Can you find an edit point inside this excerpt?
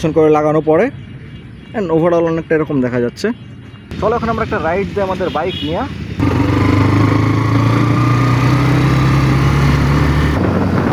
no; 0 cuts

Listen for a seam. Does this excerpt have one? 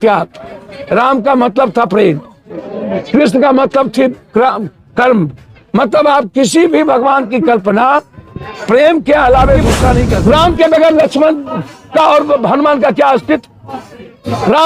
yes; 1 cut; at 10.1 s

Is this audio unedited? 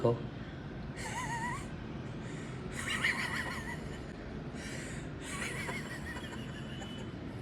yes; 0 cuts

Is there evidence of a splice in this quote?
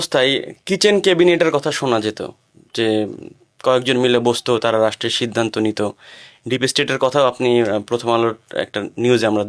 no; 0 cuts

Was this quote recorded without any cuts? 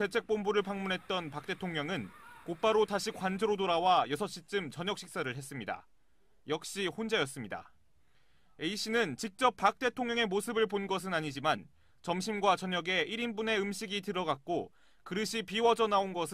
yes; 0 cuts

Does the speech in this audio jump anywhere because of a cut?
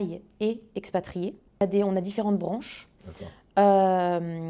no; 0 cuts

